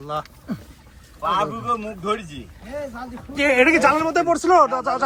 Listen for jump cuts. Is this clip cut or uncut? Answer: uncut